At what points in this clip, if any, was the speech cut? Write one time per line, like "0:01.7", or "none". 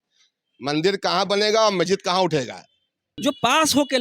0:03.1